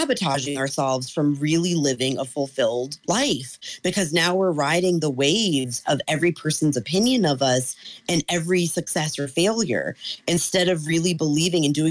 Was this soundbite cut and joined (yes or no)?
yes